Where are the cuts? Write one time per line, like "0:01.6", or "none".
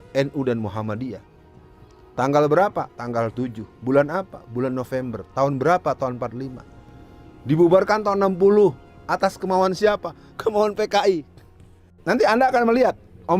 0:11.9